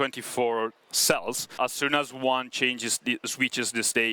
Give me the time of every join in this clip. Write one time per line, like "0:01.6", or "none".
0:01.6